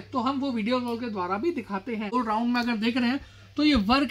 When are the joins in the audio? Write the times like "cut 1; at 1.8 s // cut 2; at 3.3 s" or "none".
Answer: cut 1; at 2.1 s